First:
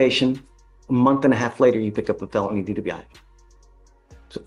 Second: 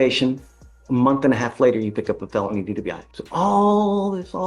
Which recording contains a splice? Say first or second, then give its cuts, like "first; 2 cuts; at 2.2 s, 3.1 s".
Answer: second; 1 cut; at 3.1 s